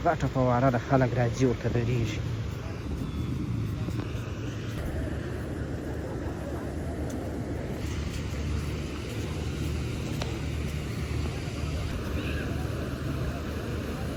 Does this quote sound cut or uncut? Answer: uncut